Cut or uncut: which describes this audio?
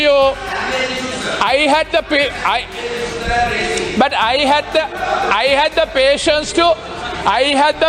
uncut